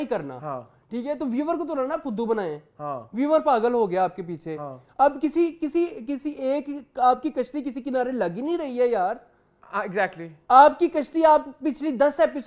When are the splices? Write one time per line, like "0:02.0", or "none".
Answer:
none